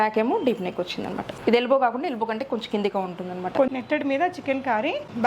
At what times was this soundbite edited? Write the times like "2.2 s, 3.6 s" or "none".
1.3 s, 3.7 s